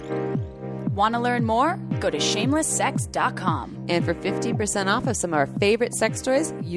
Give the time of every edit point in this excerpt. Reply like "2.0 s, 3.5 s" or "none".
0.9 s